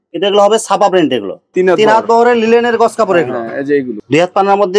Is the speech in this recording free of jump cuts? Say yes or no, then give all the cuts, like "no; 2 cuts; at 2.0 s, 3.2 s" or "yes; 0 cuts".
no; 2 cuts; at 1.4 s, 3.9 s